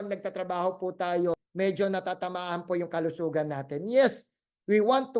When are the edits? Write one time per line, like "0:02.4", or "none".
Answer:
0:01.5